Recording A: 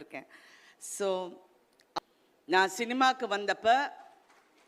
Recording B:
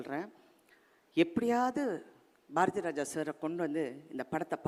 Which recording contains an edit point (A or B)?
A